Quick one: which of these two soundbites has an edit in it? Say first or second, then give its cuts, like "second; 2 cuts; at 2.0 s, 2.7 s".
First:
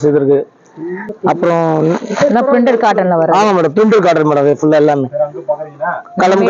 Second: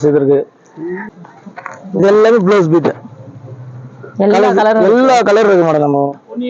second; 1 cut; at 1.1 s